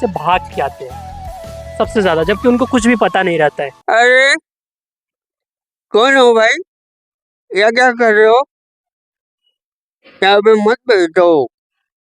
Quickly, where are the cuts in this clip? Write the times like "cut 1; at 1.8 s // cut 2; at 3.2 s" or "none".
cut 1; at 3.7 s

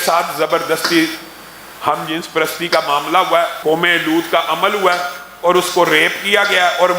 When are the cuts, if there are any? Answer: cut 1; at 3.6 s

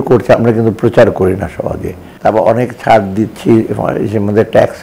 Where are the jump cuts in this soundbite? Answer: none

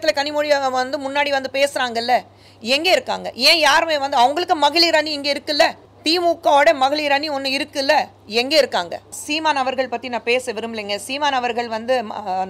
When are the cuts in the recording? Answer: cut 1; at 5.9 s // cut 2; at 9.2 s

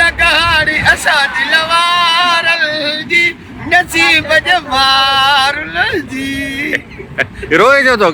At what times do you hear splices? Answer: none

